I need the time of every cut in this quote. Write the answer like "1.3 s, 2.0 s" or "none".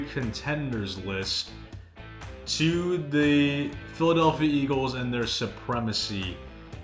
none